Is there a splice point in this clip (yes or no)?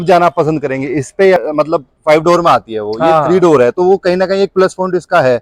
yes